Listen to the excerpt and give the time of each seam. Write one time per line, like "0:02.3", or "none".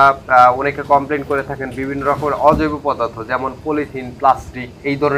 none